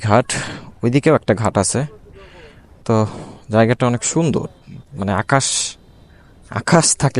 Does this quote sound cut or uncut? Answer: uncut